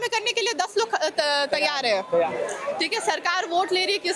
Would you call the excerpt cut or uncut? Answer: cut